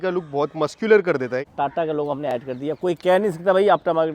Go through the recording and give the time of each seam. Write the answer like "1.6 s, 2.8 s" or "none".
1.5 s